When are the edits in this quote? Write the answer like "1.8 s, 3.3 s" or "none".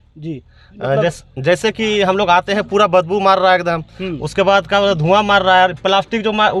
none